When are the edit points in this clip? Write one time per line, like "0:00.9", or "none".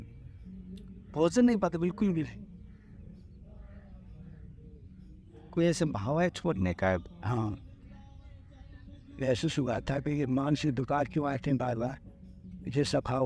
none